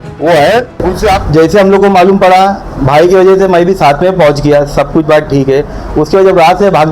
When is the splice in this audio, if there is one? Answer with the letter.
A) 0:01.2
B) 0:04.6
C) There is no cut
A